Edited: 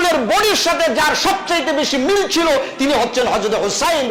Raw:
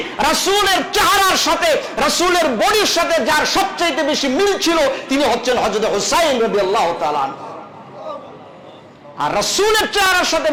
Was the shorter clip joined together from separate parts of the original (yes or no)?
no